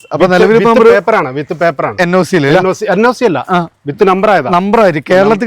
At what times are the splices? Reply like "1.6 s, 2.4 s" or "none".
none